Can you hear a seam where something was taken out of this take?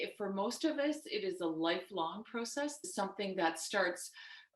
yes; 1 cut; at 2.8 s

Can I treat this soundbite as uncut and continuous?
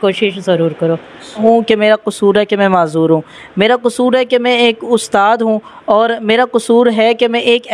no; 1 cut; at 1.4 s

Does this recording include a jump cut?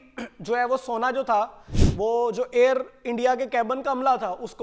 no; 0 cuts

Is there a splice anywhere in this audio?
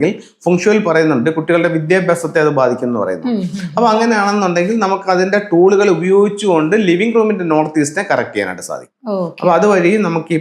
no; 0 cuts

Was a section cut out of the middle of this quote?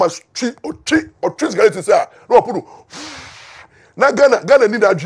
no; 0 cuts

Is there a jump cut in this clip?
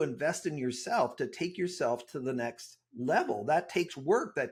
no; 0 cuts

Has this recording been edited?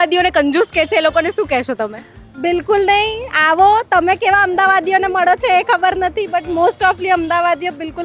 no; 0 cuts

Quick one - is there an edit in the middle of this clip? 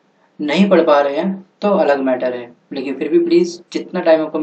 yes; 1 cut; at 2.2 s

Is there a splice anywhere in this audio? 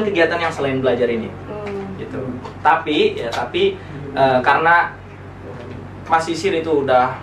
no; 0 cuts

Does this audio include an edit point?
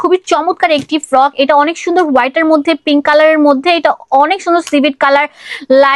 no; 0 cuts

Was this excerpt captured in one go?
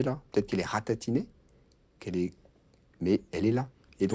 yes; 0 cuts

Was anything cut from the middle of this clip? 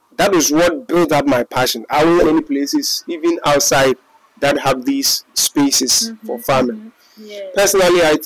yes; 1 cut; at 2.2 s

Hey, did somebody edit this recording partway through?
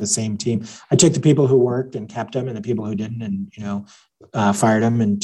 no; 0 cuts

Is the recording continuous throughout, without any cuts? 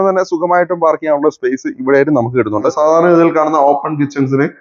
no; 1 cut; at 2.7 s

